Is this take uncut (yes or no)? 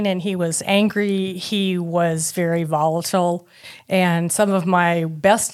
yes